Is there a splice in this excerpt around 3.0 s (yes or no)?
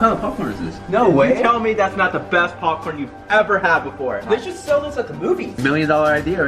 no